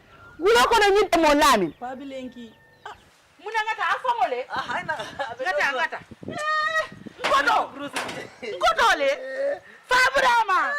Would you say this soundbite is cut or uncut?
cut